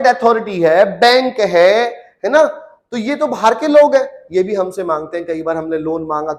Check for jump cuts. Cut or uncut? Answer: uncut